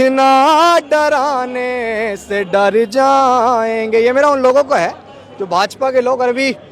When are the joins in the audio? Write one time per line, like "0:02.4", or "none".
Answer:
none